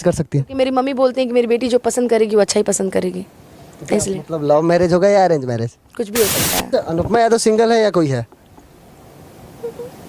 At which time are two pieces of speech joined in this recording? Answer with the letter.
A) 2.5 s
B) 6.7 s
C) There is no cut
B